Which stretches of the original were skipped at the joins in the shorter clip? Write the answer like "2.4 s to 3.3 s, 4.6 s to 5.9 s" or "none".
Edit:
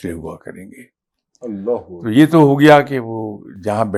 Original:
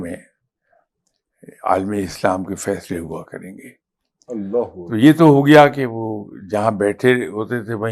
none